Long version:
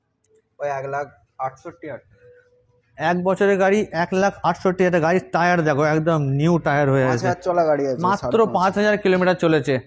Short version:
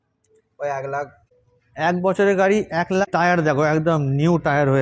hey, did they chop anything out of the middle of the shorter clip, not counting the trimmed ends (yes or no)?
yes